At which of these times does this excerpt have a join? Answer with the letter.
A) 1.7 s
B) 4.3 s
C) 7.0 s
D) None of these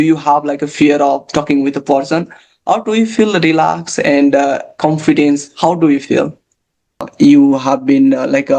C